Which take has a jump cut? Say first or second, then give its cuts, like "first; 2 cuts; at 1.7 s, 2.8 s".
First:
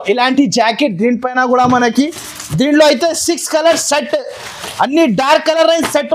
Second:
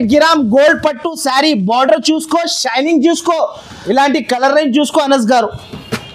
second; 1 cut; at 3.7 s